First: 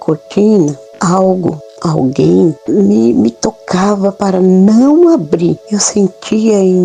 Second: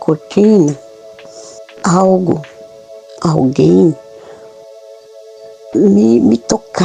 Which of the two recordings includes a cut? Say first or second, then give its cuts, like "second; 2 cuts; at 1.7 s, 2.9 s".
first; 4 cuts; at 0.9 s, 1.7 s, 2.6 s, 5.6 s